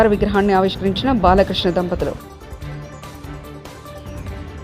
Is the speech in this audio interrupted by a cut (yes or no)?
no